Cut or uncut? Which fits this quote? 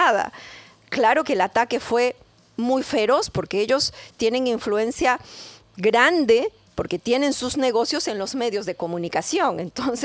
uncut